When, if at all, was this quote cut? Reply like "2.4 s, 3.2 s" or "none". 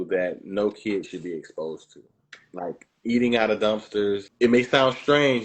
4.3 s